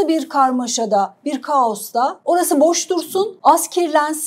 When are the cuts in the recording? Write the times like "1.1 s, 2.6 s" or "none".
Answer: 2.2 s, 3.3 s

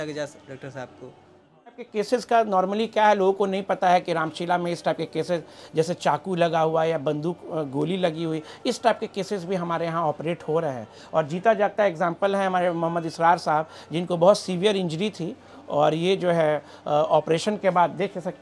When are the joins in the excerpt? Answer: 1.8 s

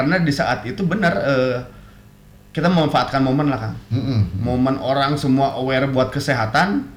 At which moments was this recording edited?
none

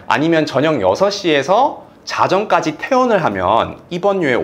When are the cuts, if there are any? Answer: none

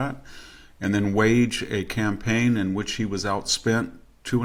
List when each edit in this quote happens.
none

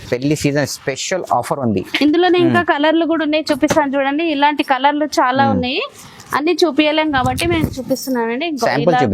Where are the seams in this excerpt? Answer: none

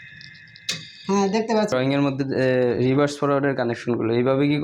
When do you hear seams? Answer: 1.7 s

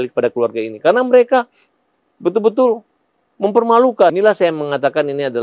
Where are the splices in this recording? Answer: 4.1 s

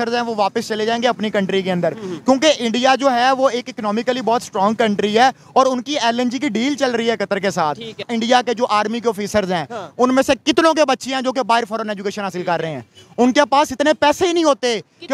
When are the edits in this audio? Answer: 7.9 s

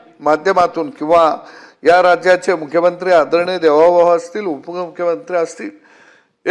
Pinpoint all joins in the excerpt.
none

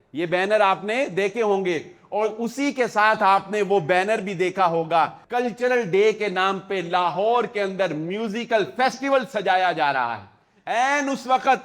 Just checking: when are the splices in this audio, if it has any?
5.2 s

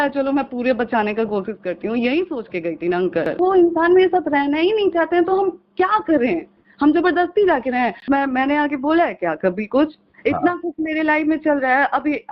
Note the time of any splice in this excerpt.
3.3 s, 8.0 s

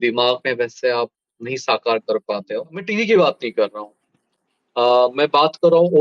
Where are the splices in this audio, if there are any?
2.9 s

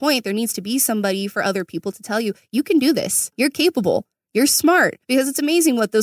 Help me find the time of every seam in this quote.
3.2 s, 5.0 s

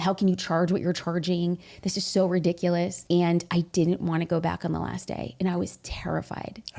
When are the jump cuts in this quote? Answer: none

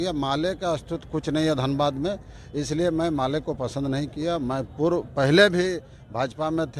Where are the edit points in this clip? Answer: none

